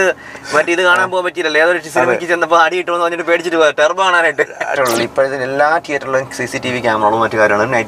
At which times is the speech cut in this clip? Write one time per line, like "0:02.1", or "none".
0:04.7